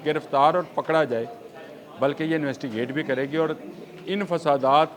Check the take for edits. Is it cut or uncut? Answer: uncut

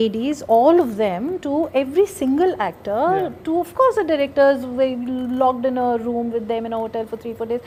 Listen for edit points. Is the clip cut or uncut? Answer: uncut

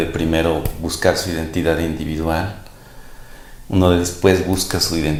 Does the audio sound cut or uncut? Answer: uncut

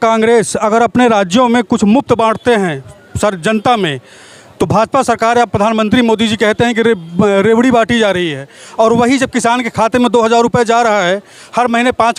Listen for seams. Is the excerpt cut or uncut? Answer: uncut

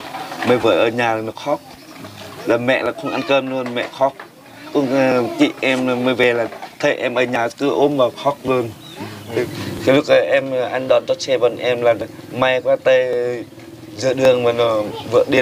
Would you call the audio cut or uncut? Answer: cut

